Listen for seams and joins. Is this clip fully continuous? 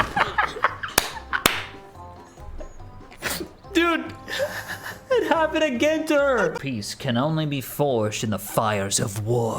no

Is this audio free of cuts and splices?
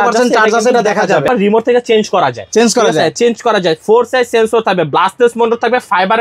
no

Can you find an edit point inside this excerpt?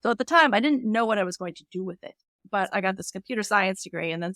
yes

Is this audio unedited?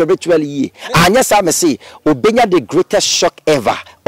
yes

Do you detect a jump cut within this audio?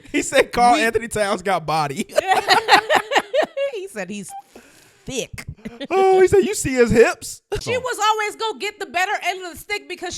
yes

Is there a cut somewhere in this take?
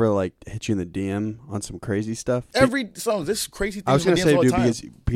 yes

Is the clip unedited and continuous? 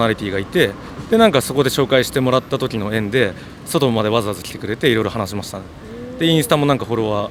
yes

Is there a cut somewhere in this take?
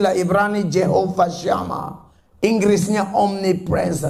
no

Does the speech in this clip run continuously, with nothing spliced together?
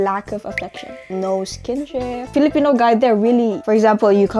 no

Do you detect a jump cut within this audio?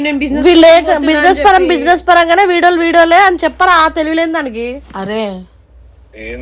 no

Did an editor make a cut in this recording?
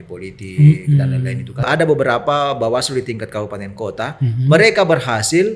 yes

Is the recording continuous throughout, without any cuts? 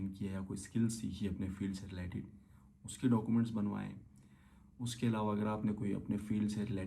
yes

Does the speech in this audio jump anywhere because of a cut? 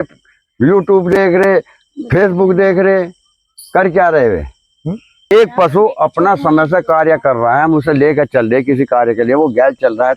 yes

